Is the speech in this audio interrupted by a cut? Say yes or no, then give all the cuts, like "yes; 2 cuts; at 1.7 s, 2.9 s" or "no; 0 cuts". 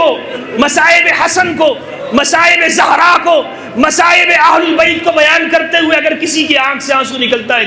no; 0 cuts